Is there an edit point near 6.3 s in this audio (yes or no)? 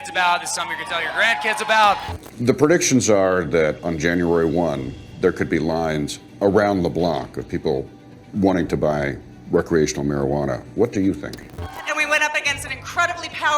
no